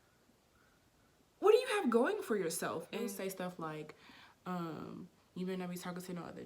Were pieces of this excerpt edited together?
yes; 1 cut; at 3.2 s

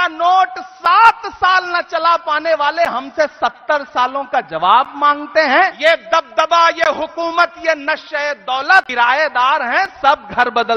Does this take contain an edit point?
yes; 2 cuts; at 5.7 s, 8.9 s

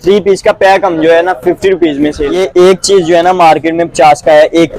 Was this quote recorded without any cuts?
no; 1 cut; at 2.2 s

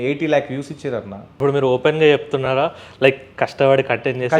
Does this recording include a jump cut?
yes; 1 cut; at 1.2 s

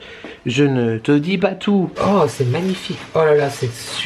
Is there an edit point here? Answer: yes; 1 cut; at 1.9 s

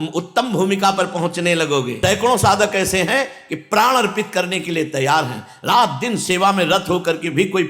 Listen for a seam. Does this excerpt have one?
yes; 1 cut; at 1.9 s

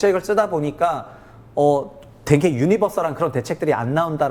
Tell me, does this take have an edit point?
no; 0 cuts

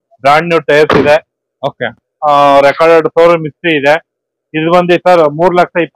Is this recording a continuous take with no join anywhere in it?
yes; 0 cuts

